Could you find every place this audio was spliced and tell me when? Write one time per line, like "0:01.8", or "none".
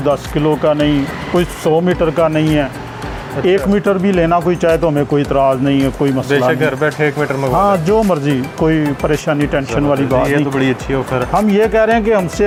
none